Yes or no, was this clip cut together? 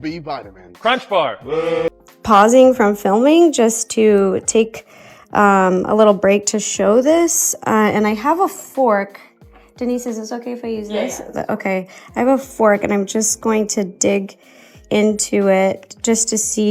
yes